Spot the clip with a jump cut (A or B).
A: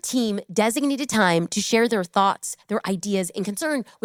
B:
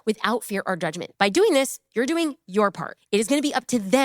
B